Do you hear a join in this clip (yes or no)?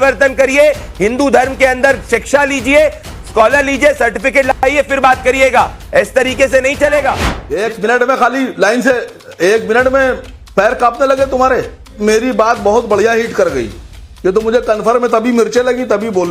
yes